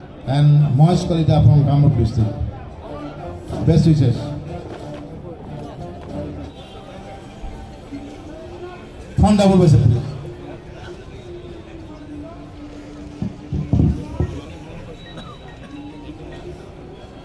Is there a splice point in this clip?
yes; 1 cut; at 6.5 s

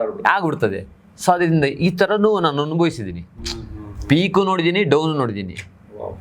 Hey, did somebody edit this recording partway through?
no; 0 cuts

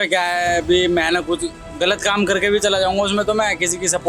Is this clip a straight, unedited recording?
yes; 0 cuts

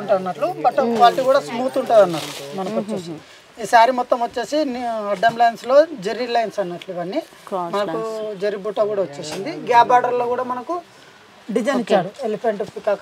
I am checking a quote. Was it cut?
no; 0 cuts

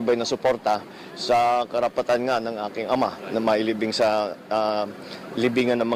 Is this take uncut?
yes; 0 cuts

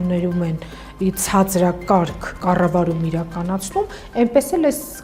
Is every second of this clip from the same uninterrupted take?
no; 1 cut; at 2.3 s

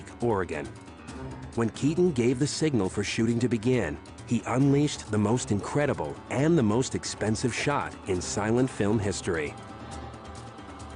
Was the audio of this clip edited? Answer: yes; 1 cut; at 7.9 s

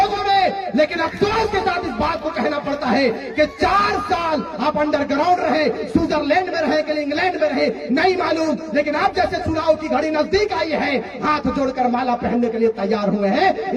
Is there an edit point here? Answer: no; 0 cuts

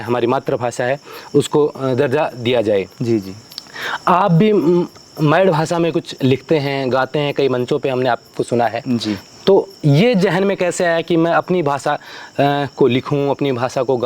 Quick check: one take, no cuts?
yes; 0 cuts

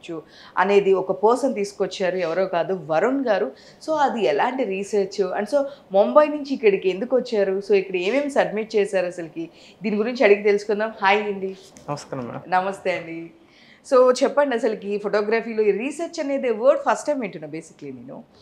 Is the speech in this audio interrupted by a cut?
no; 0 cuts

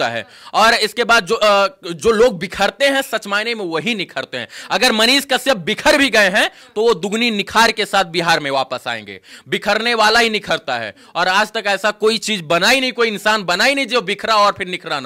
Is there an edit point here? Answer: no; 0 cuts

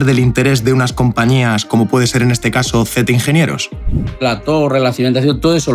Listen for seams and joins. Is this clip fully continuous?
no; 1 cut; at 4.2 s

